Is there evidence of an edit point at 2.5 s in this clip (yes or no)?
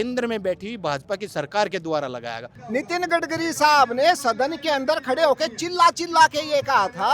yes